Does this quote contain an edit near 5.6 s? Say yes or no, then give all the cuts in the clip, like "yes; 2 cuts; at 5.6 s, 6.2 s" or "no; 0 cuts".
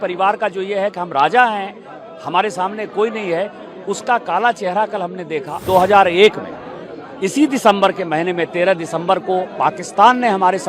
yes; 1 cut; at 5.6 s